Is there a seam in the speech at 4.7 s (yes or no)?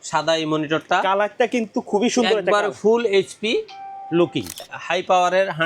yes